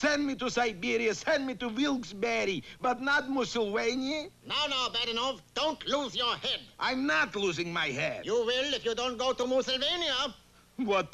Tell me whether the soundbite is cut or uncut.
uncut